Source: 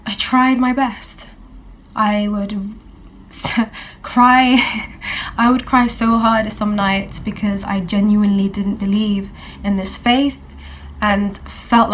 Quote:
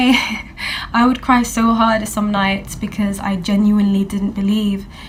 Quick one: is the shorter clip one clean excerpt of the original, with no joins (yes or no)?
yes